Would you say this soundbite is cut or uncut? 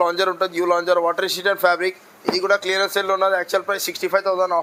uncut